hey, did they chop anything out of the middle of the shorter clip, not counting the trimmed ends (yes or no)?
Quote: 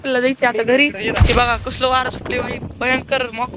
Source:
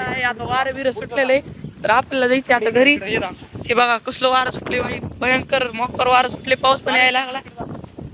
yes